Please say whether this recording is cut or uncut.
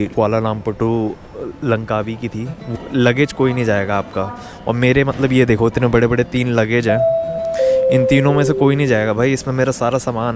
cut